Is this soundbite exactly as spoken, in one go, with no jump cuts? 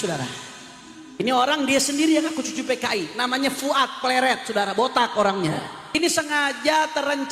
no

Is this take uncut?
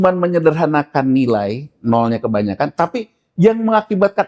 yes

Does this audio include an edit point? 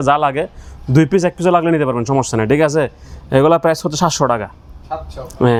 no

